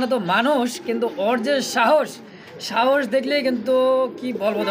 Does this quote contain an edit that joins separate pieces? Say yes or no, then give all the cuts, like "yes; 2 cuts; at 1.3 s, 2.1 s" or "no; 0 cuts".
no; 0 cuts